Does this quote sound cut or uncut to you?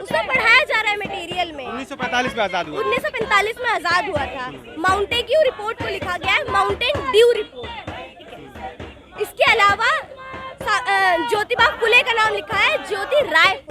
uncut